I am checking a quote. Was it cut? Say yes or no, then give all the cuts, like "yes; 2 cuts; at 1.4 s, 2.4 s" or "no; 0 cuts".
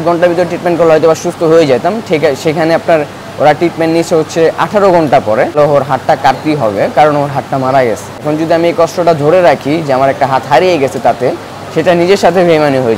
yes; 2 cuts; at 5.6 s, 8.3 s